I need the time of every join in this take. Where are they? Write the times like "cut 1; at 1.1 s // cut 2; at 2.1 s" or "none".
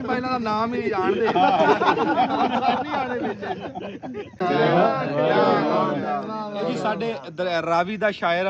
cut 1; at 4.4 s